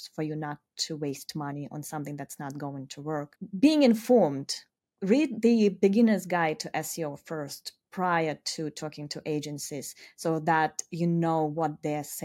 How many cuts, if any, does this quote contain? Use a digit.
0